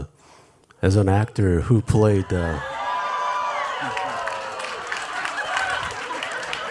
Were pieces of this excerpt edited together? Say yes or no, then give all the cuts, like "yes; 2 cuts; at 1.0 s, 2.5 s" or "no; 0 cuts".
no; 0 cuts